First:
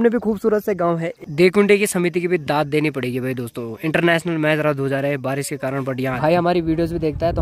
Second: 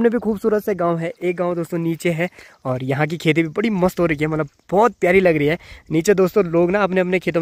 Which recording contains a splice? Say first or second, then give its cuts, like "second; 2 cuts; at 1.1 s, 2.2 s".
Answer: first; 2 cuts; at 1.1 s, 6.2 s